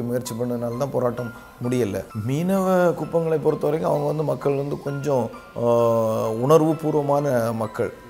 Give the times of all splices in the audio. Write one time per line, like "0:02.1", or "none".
0:02.1